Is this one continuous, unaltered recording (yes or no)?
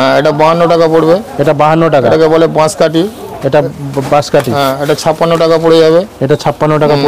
yes